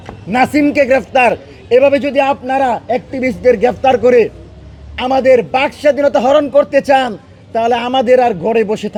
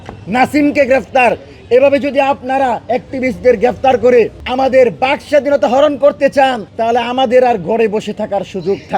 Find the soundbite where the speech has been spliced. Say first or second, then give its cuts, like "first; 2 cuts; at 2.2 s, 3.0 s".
second; 2 cuts; at 4.4 s, 6.7 s